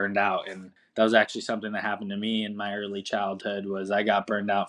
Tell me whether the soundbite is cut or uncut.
uncut